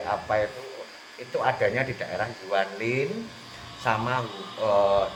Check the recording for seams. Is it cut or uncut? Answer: uncut